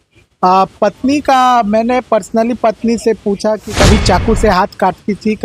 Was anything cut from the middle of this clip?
yes; 1 cut; at 3.7 s

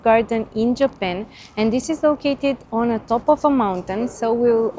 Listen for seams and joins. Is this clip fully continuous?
yes; 0 cuts

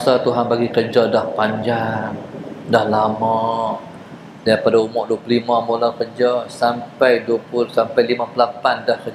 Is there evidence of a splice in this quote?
no; 0 cuts

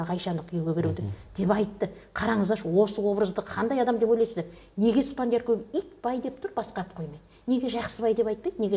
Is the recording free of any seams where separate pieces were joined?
yes; 0 cuts

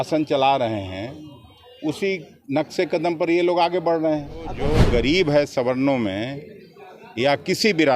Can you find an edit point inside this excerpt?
yes; 1 cut; at 4.6 s

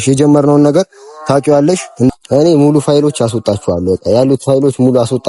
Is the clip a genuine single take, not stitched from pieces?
no; 1 cut; at 2.1 s

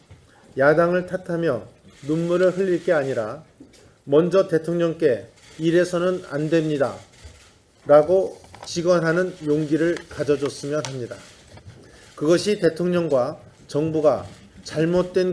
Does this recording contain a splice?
no; 0 cuts

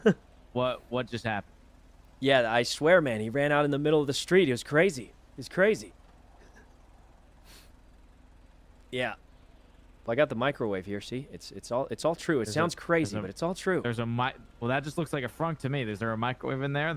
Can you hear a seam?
no; 0 cuts

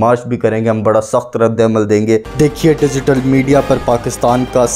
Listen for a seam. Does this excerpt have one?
yes; 1 cut; at 2.3 s

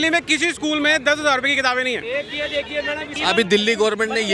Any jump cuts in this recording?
yes; 1 cut; at 3.1 s

